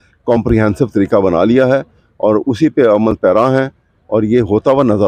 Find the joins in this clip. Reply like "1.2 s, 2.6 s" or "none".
none